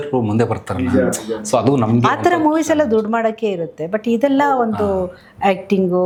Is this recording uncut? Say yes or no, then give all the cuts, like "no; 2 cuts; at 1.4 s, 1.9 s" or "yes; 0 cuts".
yes; 0 cuts